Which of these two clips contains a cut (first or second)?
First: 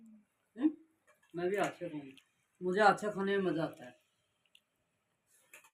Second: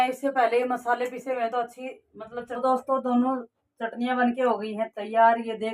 second